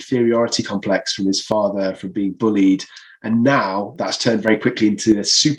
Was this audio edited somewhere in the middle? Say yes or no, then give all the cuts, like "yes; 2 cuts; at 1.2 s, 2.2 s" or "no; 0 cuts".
no; 0 cuts